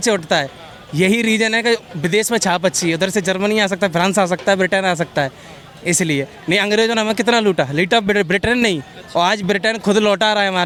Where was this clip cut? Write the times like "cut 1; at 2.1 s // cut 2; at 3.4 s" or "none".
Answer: none

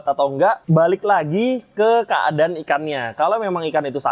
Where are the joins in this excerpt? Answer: none

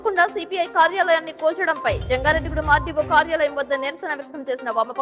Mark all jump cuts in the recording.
none

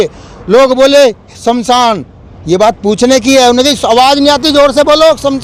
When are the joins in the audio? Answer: none

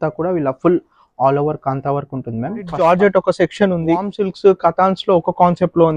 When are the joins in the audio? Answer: cut 1; at 2.7 s // cut 2; at 4.2 s

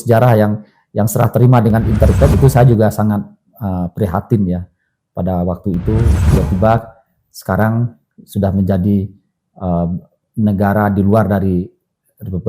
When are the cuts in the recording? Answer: cut 1; at 2.3 s // cut 2; at 6.2 s

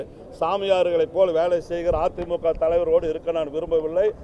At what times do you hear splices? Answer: none

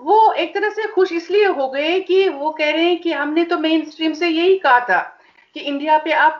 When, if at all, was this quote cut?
none

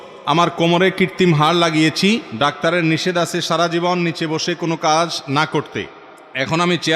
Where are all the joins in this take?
cut 1; at 2.3 s

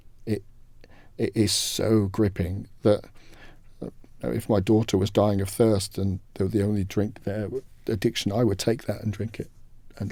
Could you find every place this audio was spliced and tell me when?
none

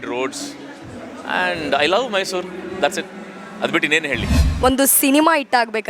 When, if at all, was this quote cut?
cut 1; at 4.4 s

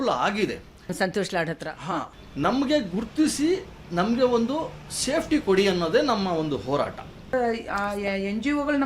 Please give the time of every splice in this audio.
cut 1; at 0.9 s // cut 2; at 2.2 s // cut 3; at 7.3 s

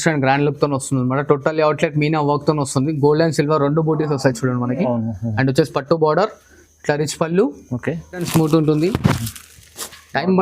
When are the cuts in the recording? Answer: cut 1; at 8.3 s

